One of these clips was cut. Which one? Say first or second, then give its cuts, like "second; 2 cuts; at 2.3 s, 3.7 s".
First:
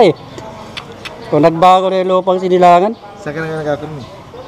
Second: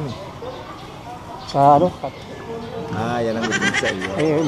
second; 1 cut; at 2.0 s